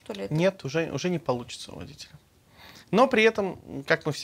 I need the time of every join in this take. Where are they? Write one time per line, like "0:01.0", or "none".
none